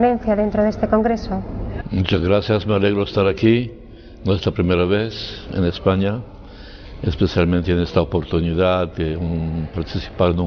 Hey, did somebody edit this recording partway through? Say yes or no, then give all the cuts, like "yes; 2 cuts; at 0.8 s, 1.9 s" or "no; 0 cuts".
no; 0 cuts